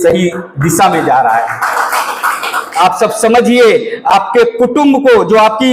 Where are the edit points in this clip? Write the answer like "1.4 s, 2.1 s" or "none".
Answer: 2.6 s